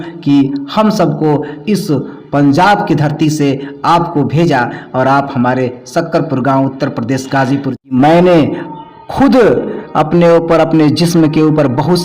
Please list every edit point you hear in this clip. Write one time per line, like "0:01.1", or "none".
0:07.9